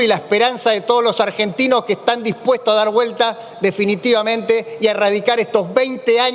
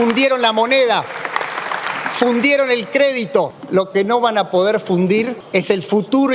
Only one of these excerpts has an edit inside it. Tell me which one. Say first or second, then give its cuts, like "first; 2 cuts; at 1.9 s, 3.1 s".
second; 2 cuts; at 3.6 s, 5.4 s